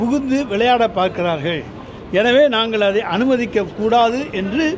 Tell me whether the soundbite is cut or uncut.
uncut